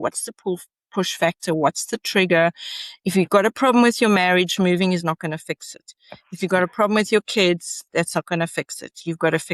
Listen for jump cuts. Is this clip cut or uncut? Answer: uncut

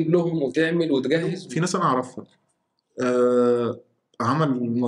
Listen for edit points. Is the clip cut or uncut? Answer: cut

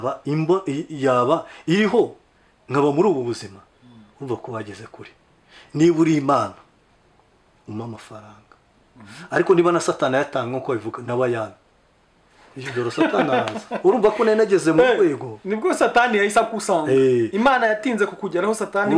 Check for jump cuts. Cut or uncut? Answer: uncut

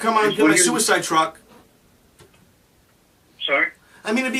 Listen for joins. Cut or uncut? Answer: uncut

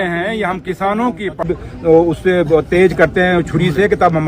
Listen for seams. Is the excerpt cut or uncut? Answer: cut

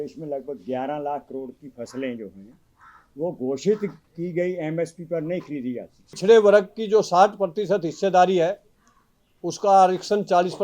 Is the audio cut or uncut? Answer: cut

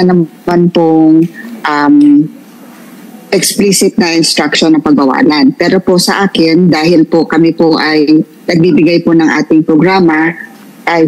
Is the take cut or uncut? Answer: uncut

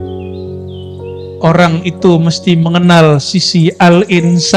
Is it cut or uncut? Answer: uncut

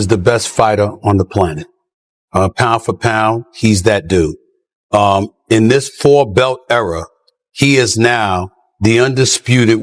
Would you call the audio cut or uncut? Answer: uncut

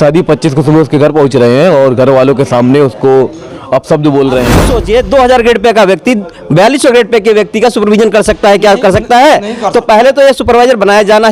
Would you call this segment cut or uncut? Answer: cut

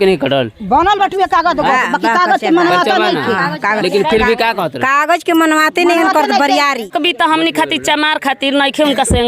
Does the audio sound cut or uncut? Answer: cut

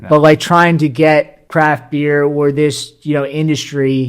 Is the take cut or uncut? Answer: cut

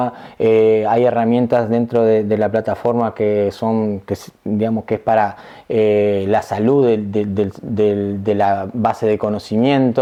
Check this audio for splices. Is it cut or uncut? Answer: uncut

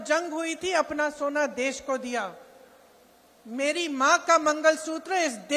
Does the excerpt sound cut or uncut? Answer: uncut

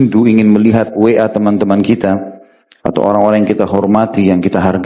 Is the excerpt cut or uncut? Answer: uncut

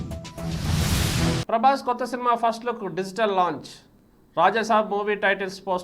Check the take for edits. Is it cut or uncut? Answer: cut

